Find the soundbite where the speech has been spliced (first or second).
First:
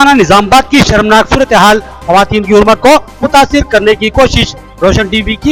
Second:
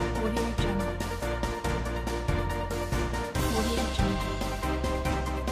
second